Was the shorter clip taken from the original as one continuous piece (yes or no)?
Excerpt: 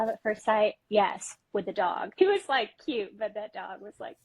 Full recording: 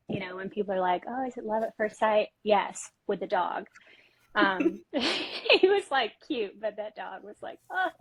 no